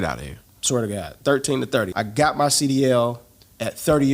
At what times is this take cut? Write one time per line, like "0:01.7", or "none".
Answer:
0:01.9